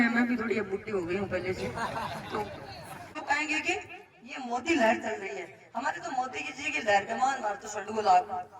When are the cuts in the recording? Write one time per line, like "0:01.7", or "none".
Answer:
0:03.1